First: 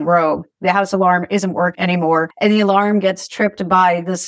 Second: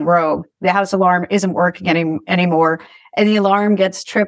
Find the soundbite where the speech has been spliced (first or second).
first